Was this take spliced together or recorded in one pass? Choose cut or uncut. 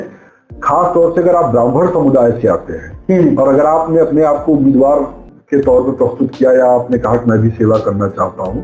uncut